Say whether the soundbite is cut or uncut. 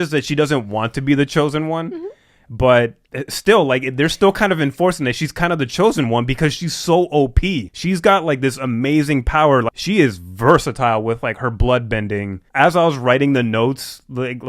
cut